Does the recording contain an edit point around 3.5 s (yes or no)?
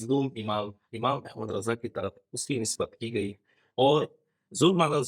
no